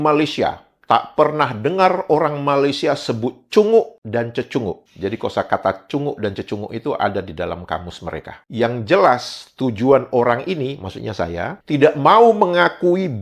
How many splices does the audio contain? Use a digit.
1